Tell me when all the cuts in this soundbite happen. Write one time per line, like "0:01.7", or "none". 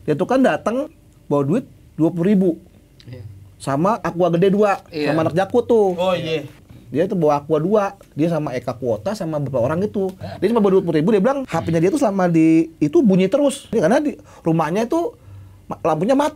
0:00.9
0:04.0
0:06.6
0:10.3
0:11.5
0:13.7